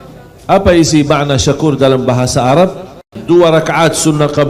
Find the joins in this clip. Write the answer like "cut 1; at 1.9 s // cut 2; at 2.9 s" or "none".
cut 1; at 3.2 s